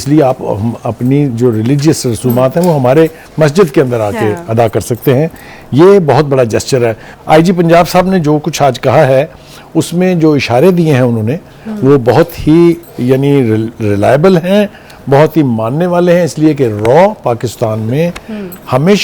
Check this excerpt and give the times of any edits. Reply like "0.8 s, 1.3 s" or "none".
7.1 s